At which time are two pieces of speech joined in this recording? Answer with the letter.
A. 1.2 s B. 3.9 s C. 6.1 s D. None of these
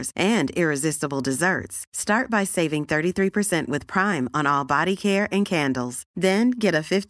D